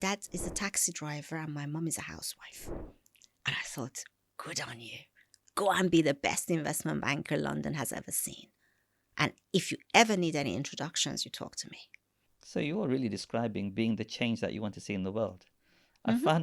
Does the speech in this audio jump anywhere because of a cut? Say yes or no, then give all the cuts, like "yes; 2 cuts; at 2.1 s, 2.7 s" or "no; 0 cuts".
no; 0 cuts